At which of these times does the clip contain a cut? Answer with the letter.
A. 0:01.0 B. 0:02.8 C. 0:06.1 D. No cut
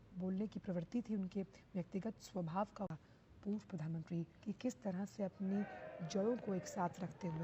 B